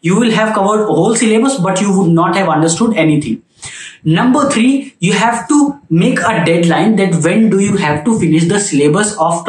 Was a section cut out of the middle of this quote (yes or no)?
no